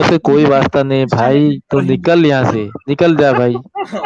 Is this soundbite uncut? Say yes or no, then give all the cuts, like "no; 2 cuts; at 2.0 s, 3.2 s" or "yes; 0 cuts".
yes; 0 cuts